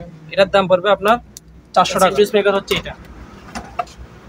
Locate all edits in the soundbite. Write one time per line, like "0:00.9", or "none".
0:02.1